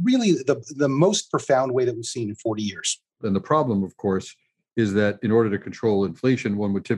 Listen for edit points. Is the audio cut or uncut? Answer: cut